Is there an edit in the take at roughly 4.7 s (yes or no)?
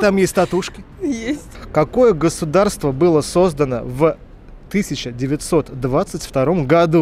no